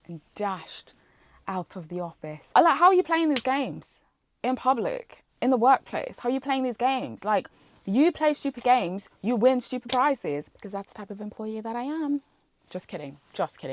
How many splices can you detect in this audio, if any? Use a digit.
2